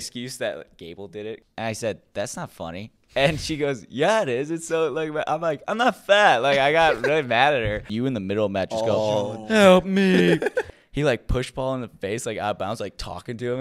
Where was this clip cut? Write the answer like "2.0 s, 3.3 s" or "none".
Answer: 1.4 s, 7.9 s, 10.7 s